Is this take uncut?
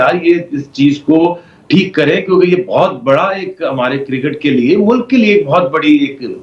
yes; 0 cuts

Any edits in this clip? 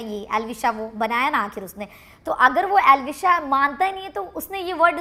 no; 0 cuts

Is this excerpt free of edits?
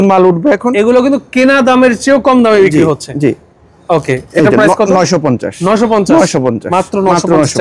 yes; 0 cuts

